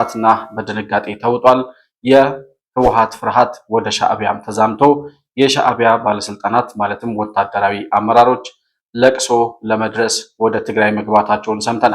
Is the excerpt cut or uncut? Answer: uncut